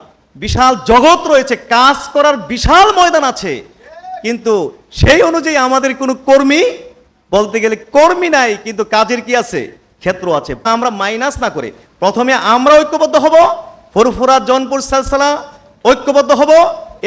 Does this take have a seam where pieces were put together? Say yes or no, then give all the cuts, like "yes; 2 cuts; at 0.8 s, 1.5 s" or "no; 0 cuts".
yes; 1 cut; at 10.7 s